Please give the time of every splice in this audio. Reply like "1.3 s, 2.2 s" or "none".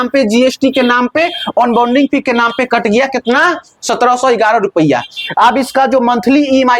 none